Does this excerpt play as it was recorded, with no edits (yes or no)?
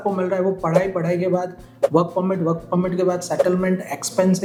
yes